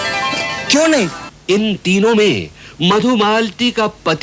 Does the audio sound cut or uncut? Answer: cut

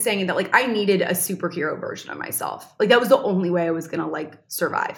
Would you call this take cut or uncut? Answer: uncut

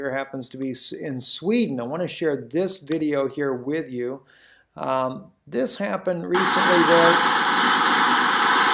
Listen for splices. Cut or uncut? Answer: cut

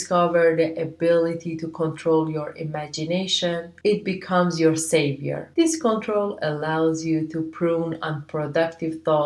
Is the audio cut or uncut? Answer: uncut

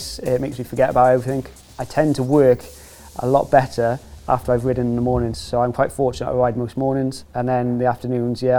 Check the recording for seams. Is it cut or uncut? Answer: cut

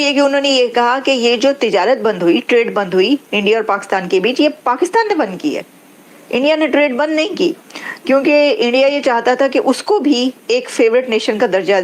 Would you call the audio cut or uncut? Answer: uncut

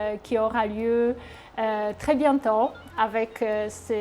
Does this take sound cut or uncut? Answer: cut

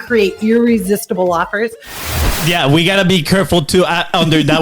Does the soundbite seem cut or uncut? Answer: cut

